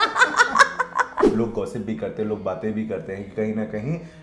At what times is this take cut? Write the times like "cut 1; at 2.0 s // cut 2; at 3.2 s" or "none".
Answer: cut 1; at 1.3 s